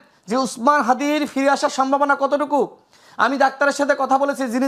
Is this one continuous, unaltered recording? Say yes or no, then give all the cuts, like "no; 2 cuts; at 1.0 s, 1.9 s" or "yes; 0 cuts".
yes; 0 cuts